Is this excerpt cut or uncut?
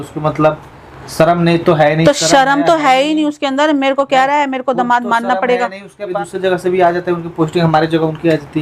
cut